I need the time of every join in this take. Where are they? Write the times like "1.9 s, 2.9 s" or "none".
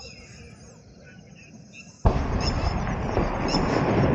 none